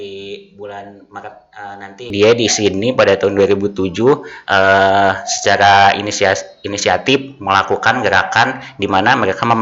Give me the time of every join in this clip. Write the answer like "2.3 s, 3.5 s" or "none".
2.1 s